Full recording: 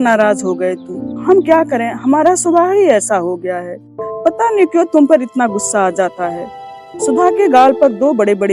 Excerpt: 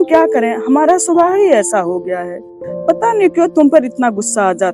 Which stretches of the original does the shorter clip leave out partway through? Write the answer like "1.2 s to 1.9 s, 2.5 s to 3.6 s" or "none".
none